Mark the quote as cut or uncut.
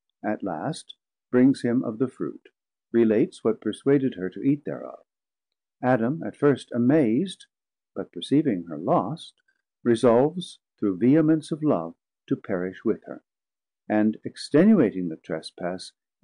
uncut